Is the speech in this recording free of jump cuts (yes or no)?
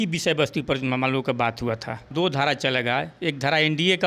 no